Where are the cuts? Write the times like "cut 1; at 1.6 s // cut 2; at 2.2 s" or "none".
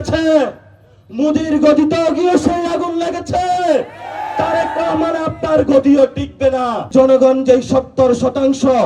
cut 1; at 6.9 s